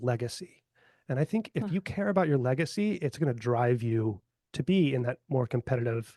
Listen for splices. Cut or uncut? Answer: uncut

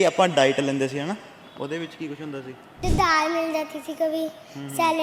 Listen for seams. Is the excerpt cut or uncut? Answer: cut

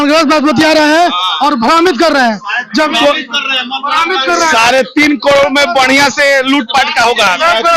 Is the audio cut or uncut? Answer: uncut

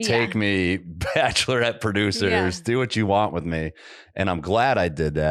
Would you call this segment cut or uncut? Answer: uncut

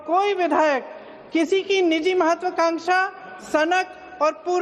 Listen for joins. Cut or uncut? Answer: uncut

